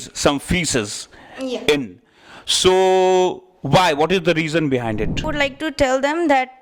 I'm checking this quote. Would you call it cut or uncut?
cut